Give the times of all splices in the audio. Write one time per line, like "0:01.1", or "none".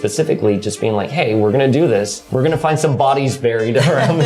0:02.2